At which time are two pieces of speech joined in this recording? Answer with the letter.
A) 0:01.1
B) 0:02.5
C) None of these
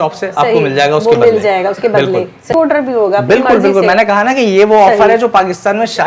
B